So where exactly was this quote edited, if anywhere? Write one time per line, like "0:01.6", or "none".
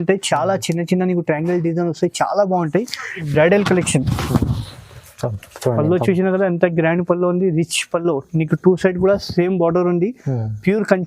0:03.3